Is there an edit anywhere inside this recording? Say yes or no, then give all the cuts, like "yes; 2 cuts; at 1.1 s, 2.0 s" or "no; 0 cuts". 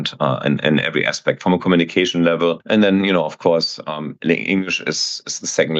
yes; 1 cut; at 2.6 s